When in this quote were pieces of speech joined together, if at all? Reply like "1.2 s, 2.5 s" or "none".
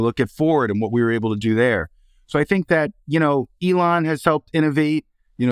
none